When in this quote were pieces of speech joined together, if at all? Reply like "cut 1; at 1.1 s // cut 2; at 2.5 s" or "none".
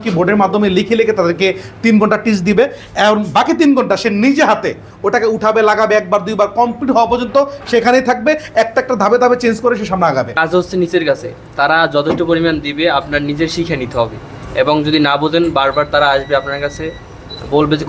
cut 1; at 10.4 s